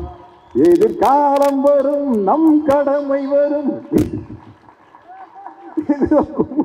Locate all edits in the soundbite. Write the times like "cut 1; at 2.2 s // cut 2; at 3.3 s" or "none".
none